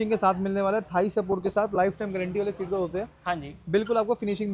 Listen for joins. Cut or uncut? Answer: uncut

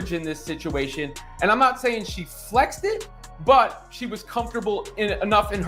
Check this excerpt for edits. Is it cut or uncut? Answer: uncut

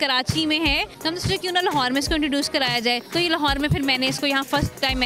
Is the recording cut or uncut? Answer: cut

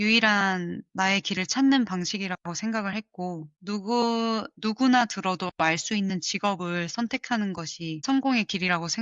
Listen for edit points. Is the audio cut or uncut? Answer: cut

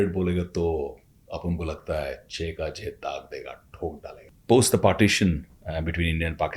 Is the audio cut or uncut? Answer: cut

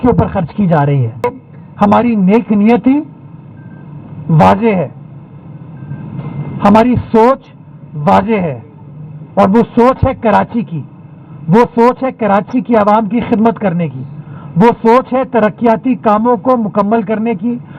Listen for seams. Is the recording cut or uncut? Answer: cut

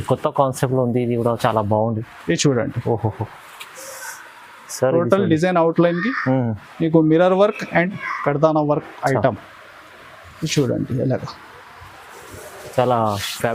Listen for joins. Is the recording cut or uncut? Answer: uncut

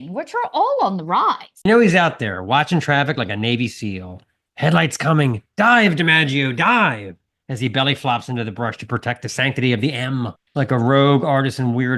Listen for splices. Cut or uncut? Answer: cut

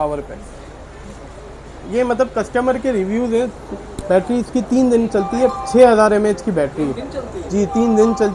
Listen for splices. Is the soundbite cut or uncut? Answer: uncut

